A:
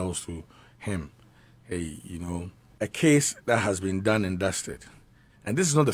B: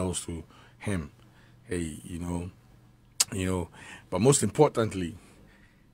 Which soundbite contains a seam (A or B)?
A